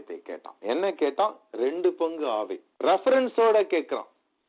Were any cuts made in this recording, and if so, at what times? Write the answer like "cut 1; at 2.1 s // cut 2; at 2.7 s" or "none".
cut 1; at 2.6 s